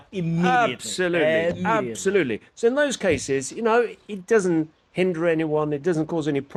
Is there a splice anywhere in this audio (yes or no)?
no